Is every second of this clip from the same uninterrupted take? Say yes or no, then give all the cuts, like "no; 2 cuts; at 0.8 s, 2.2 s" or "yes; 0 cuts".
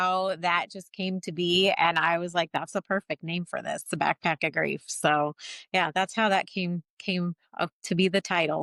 yes; 0 cuts